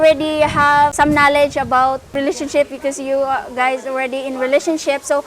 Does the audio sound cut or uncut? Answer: cut